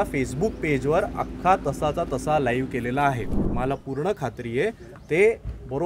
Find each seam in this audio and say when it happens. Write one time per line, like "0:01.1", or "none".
0:03.4